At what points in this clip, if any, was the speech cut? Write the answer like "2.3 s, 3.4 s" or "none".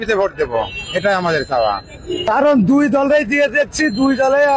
2.2 s